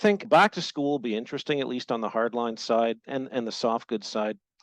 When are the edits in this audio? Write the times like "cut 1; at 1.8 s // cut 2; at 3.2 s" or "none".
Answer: none